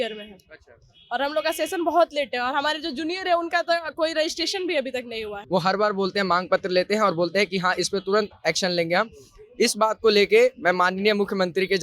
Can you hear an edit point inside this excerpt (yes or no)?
yes